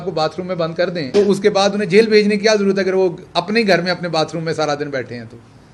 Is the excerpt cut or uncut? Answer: uncut